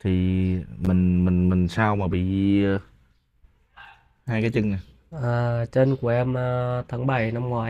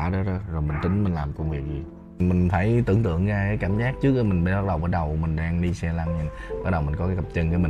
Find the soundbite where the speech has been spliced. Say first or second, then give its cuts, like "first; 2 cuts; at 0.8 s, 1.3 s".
second; 1 cut; at 2.2 s